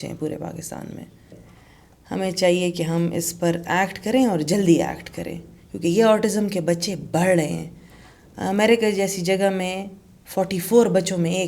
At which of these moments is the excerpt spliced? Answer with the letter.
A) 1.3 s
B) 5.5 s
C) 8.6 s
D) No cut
A